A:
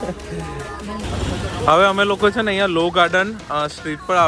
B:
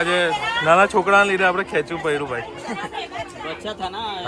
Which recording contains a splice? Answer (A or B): A